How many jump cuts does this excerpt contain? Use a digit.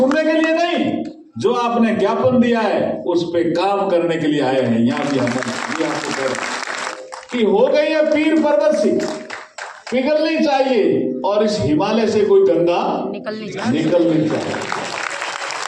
1